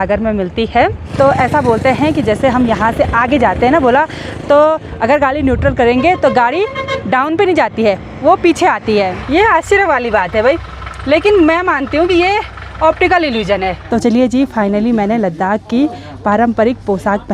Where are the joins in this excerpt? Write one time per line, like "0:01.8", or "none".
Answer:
0:01.0
0:09.2
0:13.8